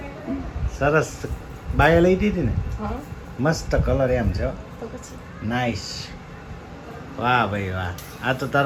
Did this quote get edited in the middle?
no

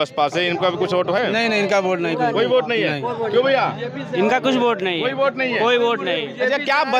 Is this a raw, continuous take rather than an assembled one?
yes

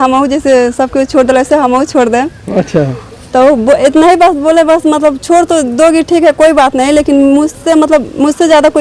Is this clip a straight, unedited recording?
yes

